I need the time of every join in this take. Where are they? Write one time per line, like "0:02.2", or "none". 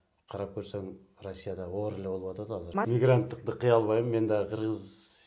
0:02.9